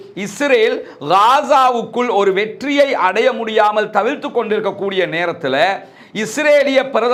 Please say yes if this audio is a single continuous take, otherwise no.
yes